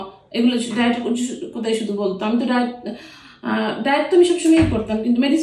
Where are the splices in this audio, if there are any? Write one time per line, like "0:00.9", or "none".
none

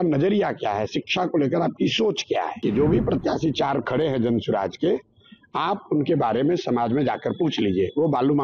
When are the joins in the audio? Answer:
0:02.6

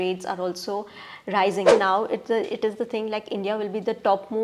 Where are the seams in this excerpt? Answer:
0:01.7

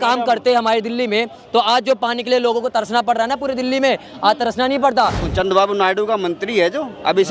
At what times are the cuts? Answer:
0:05.2

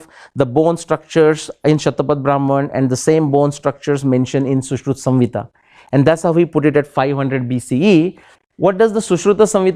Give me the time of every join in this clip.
0:08.3

